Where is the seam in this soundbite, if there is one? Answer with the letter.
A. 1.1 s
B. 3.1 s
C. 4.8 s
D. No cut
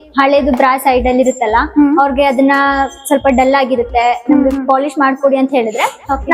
D